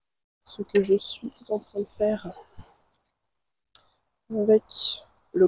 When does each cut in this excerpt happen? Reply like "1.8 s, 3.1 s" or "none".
none